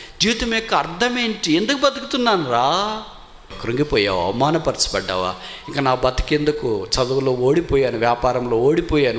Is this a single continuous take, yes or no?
no